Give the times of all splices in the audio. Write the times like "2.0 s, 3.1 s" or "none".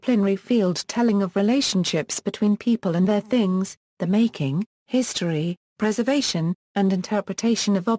5.6 s